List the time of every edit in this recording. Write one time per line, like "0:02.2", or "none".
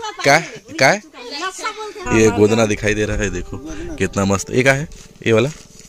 0:02.1